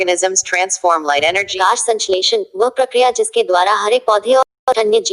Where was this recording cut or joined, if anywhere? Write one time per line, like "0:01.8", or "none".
0:01.6